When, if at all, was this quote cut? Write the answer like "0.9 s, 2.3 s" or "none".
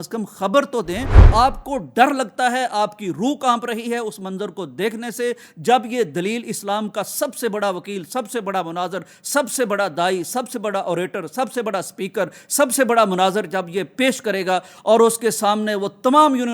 1.2 s